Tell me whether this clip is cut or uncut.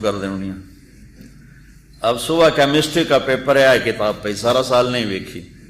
uncut